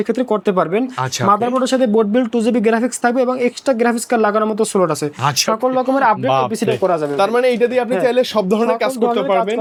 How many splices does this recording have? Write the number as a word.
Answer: zero